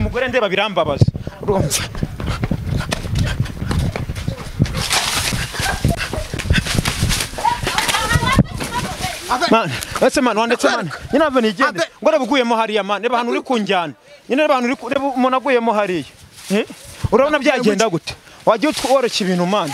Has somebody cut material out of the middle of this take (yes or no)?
no